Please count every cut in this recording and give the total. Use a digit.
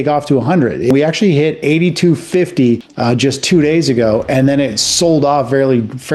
2